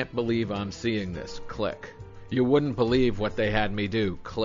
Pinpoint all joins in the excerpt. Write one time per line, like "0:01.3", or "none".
0:02.2